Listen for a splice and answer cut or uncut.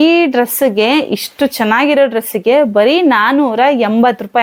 uncut